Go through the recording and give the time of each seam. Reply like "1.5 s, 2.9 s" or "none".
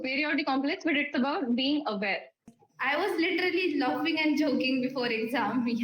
2.5 s